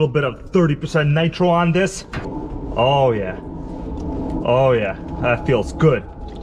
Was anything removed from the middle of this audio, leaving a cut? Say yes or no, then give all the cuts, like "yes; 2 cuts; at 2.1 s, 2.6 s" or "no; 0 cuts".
yes; 1 cut; at 2.3 s